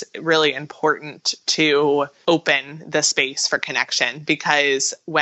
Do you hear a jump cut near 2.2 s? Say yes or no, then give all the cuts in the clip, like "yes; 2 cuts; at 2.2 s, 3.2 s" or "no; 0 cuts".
yes; 1 cut; at 2.2 s